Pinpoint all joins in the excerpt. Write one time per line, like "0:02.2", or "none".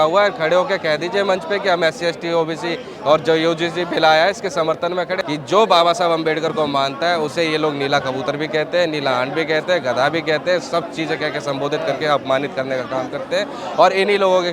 0:05.1